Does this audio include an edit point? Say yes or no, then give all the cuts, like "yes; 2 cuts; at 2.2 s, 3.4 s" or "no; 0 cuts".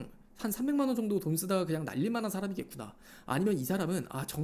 no; 0 cuts